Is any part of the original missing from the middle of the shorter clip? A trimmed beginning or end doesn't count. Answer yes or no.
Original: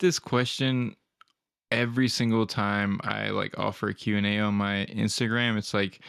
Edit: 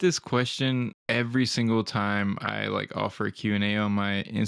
yes